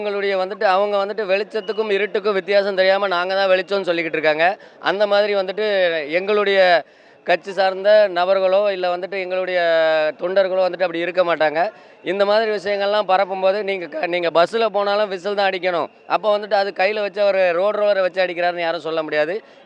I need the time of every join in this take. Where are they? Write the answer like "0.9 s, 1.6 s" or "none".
none